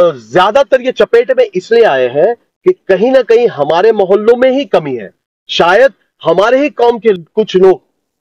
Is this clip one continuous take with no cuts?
yes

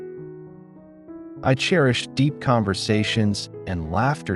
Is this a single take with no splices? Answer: yes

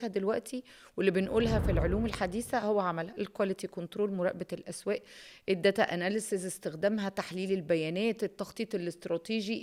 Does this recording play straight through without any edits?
yes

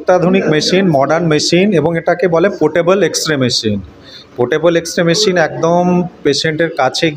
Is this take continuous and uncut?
yes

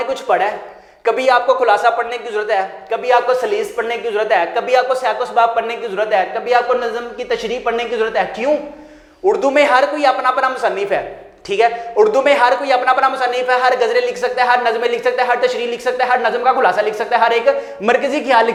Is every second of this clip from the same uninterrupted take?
yes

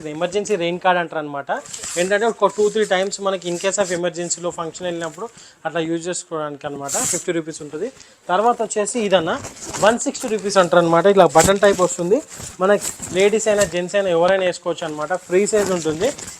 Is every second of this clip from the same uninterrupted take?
yes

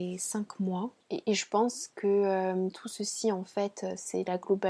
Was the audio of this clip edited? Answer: yes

